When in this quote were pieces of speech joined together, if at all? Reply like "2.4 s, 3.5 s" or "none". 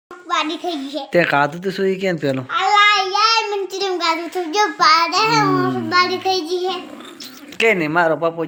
none